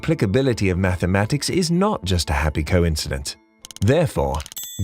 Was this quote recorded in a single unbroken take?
yes; 0 cuts

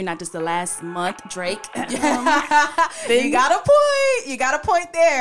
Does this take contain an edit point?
no; 0 cuts

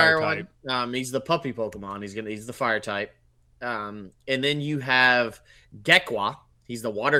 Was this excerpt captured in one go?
yes; 0 cuts

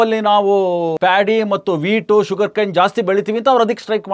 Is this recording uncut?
no; 1 cut; at 0.9 s

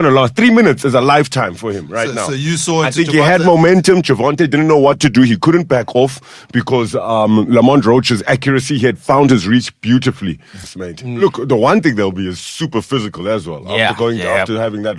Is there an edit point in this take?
yes; 1 cut; at 10.6 s

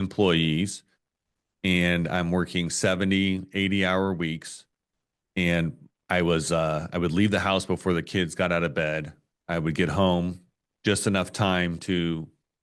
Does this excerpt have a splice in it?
no; 0 cuts

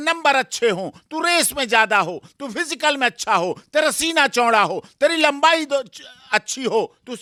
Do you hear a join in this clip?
no; 0 cuts

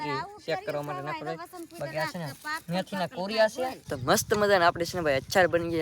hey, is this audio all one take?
no; 1 cut; at 3.9 s

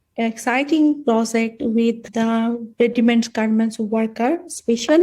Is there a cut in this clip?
yes; 1 cut; at 2.0 s

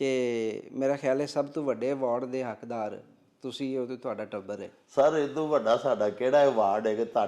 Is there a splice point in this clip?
no; 0 cuts

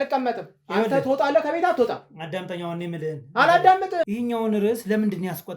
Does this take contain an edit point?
yes; 1 cut; at 4.1 s

